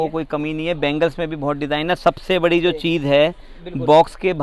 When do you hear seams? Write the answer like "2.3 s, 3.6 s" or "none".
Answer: none